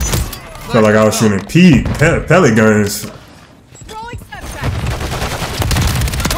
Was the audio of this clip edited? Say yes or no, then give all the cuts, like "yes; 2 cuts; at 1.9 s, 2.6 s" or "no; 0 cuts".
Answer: no; 0 cuts